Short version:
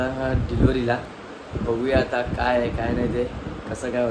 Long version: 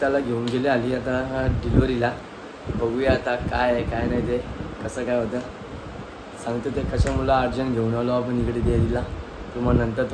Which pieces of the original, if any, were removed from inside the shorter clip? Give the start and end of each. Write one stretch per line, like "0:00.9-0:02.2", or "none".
none